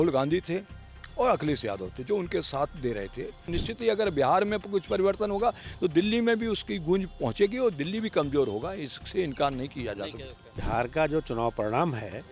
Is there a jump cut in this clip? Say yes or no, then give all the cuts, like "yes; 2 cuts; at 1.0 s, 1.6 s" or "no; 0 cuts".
yes; 2 cuts; at 3.6 s, 10.6 s